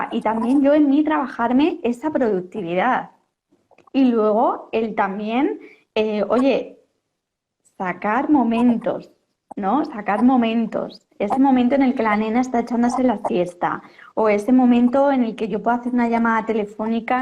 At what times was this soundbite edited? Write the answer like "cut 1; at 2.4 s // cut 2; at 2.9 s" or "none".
none